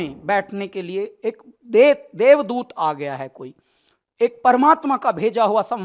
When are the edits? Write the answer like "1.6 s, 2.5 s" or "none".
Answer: none